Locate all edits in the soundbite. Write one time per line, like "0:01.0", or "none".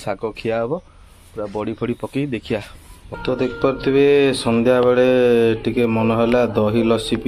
0:03.1